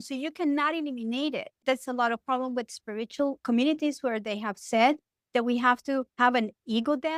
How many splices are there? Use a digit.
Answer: 3